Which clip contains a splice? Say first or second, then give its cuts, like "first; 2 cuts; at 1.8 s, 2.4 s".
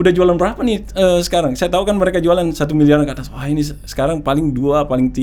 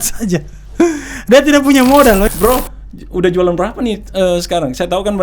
second; 1 cut; at 2.3 s